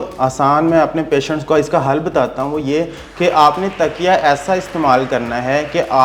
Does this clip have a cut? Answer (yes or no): no